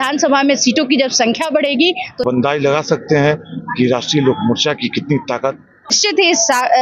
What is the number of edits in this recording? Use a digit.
2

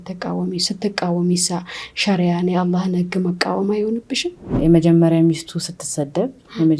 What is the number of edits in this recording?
1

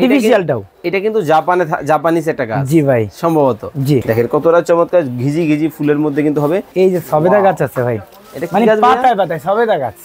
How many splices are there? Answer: 2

